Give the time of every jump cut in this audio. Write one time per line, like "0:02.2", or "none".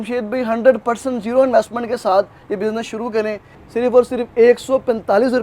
0:03.5